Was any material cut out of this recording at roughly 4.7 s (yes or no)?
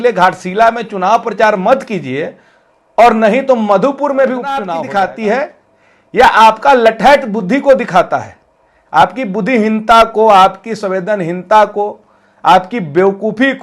yes